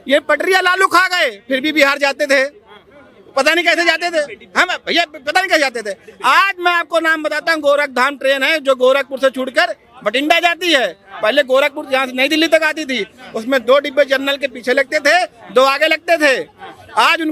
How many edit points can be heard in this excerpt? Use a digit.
0